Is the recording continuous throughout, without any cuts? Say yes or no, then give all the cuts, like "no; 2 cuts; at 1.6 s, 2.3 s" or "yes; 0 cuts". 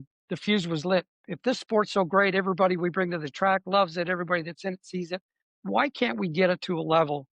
no; 1 cut; at 1.2 s